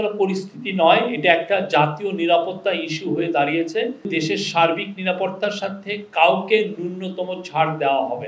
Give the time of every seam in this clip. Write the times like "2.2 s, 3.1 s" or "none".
4.1 s